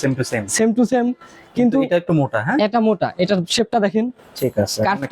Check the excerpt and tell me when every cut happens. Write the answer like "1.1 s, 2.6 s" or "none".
none